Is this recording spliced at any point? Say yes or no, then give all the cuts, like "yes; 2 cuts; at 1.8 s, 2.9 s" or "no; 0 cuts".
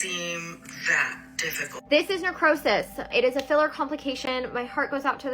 yes; 2 cuts; at 1.7 s, 3.1 s